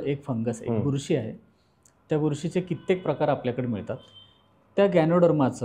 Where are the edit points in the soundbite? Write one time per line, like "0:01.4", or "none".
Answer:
none

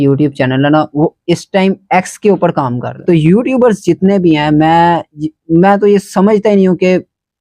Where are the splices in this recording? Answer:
0:03.0

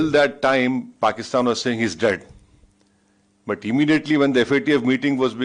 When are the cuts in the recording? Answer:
none

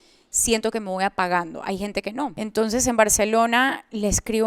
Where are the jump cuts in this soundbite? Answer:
0:02.3

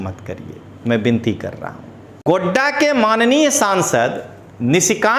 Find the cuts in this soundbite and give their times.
0:02.2

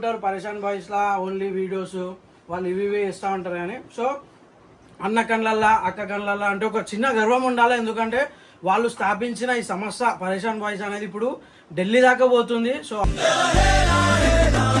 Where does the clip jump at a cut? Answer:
none

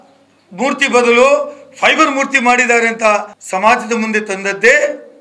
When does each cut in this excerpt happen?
0:03.4

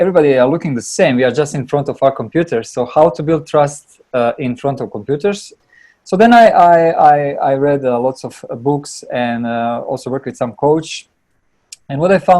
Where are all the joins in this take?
0:05.5

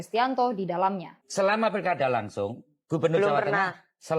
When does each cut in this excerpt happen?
0:01.2

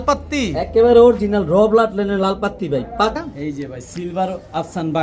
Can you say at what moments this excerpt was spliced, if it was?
0:03.2

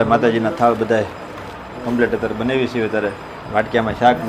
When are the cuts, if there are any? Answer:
none

